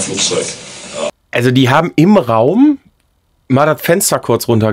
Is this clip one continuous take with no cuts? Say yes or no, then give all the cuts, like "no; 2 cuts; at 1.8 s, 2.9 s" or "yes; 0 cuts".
no; 1 cut; at 1.2 s